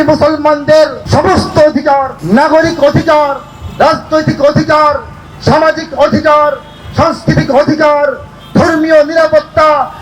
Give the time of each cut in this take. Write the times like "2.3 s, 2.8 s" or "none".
1.0 s, 2.1 s